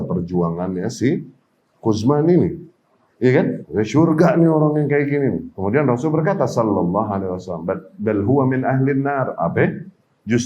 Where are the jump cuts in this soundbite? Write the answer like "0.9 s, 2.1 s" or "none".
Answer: 3.6 s, 5.5 s